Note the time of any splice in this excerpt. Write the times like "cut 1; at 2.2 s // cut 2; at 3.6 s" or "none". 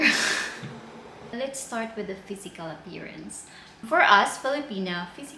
cut 1; at 1.3 s